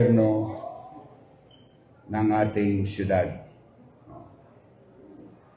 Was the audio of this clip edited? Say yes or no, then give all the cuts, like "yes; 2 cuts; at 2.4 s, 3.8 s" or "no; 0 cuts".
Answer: no; 0 cuts